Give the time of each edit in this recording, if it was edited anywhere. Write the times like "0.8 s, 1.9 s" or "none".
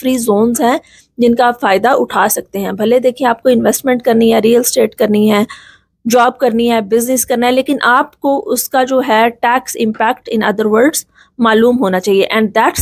none